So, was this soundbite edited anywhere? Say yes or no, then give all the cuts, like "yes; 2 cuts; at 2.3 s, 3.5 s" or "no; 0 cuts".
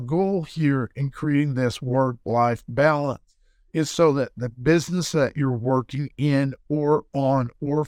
no; 0 cuts